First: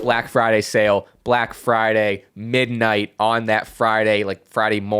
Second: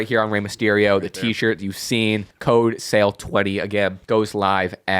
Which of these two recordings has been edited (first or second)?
second